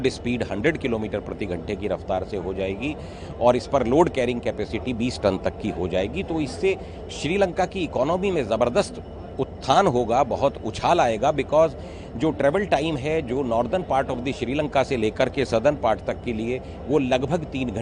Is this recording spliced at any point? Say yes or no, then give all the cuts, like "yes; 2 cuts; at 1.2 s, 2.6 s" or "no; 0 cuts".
no; 0 cuts